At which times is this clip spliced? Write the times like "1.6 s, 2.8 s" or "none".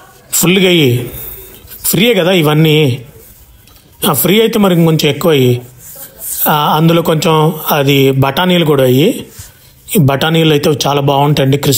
none